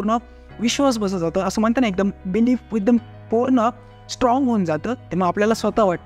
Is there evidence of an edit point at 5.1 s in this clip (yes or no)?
yes